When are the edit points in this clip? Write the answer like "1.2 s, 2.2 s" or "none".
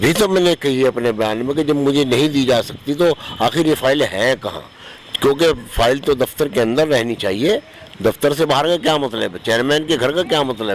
none